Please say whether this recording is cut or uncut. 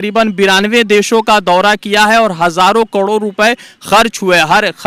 uncut